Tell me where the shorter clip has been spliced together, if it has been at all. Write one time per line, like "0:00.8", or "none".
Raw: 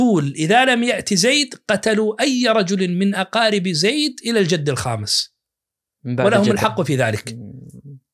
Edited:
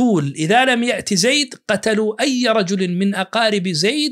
none